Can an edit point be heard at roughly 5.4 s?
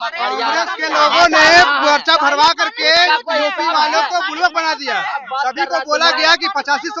no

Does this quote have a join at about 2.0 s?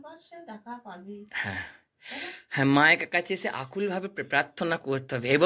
no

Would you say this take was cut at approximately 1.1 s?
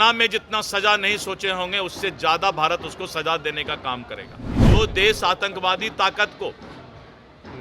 no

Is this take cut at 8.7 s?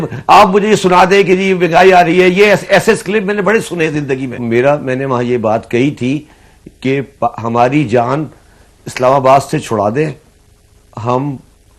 no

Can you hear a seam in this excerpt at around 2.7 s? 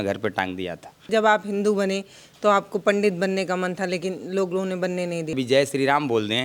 no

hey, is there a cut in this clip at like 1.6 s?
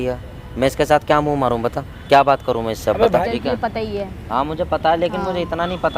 no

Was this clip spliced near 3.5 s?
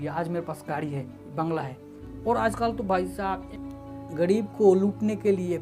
yes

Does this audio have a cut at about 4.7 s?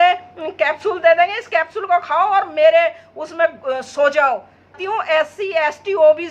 yes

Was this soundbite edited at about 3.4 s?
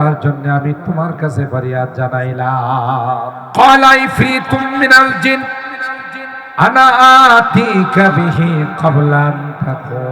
yes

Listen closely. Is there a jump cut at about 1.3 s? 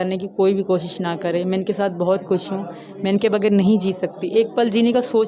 no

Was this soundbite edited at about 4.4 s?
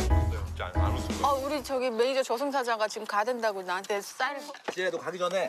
yes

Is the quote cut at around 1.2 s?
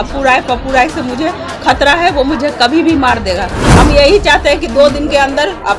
no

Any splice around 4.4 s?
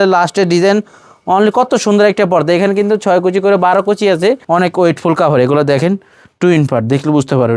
yes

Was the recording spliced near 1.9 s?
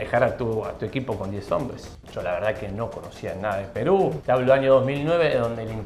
yes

